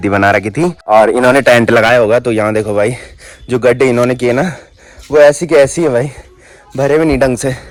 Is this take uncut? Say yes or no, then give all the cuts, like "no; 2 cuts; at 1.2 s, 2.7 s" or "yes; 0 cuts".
yes; 0 cuts